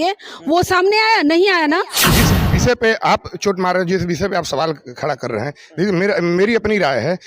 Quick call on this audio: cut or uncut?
cut